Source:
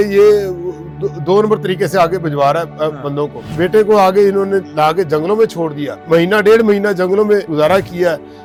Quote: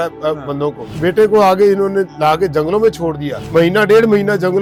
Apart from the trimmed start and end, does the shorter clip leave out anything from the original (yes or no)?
no